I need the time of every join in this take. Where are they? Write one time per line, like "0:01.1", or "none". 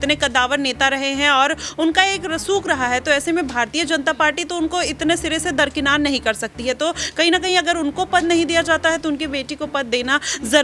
none